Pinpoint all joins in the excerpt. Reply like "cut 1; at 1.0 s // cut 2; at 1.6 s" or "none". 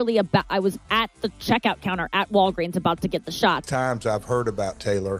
cut 1; at 3.6 s